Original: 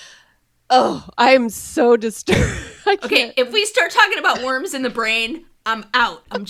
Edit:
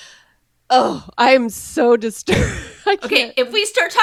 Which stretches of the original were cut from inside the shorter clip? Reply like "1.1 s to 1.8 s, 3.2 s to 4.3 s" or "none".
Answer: none